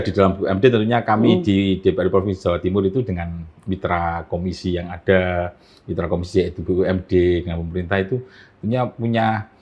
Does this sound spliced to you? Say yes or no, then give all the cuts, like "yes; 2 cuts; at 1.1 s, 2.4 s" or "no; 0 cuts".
no; 0 cuts